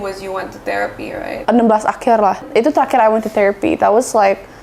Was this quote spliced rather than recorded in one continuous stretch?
yes; 2 cuts; at 1.2 s, 2.5 s

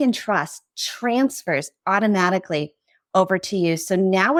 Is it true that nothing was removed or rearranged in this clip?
yes; 0 cuts

